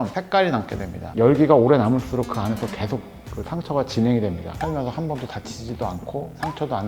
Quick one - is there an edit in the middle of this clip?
yes; 2 cuts; at 1.0 s, 4.5 s

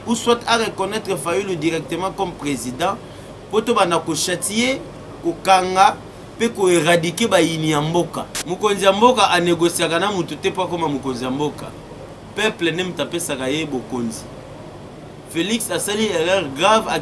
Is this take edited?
yes; 1 cut; at 8.4 s

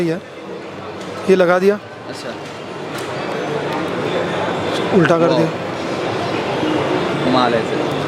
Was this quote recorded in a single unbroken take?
yes; 0 cuts

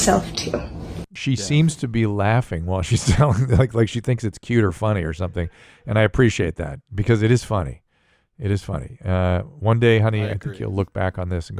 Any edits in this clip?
yes; 1 cut; at 1.1 s

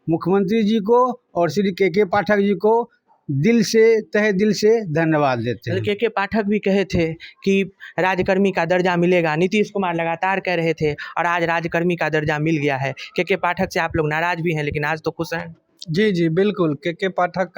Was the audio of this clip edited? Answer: no; 0 cuts

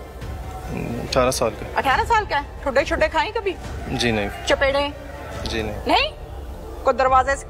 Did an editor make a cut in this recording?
no; 0 cuts

